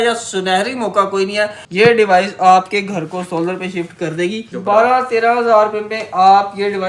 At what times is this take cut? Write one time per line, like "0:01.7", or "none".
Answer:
0:01.6
0:04.5